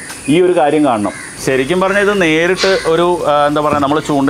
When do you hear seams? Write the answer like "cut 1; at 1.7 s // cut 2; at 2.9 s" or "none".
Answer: cut 1; at 1.3 s